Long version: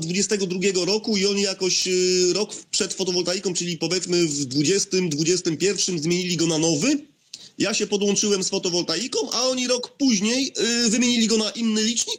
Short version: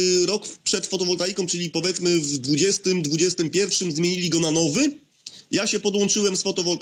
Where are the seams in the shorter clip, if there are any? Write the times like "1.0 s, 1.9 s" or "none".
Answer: none